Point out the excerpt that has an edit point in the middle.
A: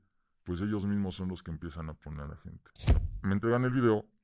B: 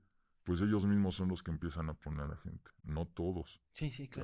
A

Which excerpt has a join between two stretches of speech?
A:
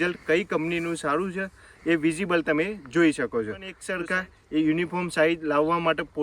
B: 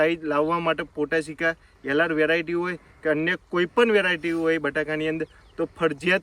A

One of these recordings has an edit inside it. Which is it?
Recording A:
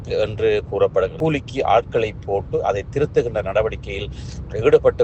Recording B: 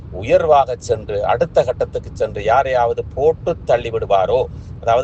A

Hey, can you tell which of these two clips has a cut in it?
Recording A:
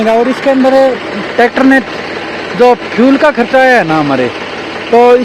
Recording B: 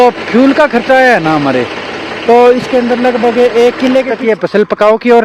B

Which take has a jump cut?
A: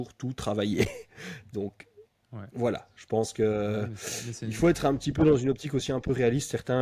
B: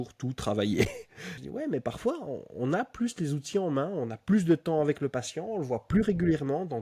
B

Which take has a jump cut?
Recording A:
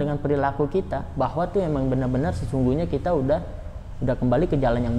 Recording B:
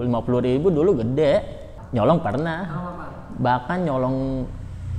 B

